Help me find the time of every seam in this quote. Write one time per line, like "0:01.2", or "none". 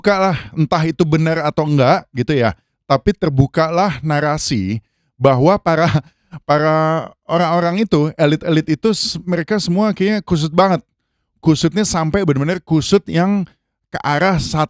none